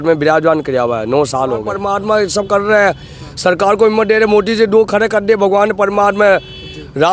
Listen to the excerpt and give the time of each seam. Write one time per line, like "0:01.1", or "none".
0:01.8